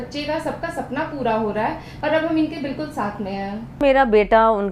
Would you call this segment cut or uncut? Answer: uncut